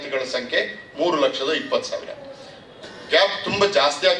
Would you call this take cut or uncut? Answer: uncut